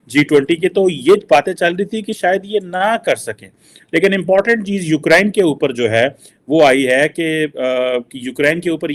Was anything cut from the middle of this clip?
no; 0 cuts

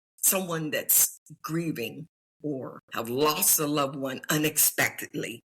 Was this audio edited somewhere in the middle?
yes; 1 cut; at 2.8 s

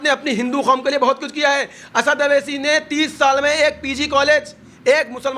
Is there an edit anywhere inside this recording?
no; 0 cuts

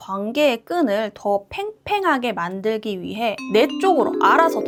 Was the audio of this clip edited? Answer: no; 0 cuts

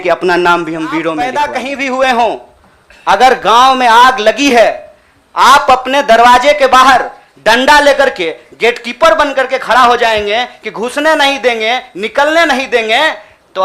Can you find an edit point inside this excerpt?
yes; 1 cut; at 1.2 s

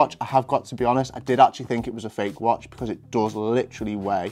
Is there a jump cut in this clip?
no; 0 cuts

